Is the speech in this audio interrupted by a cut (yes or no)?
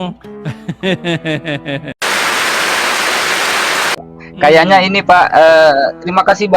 yes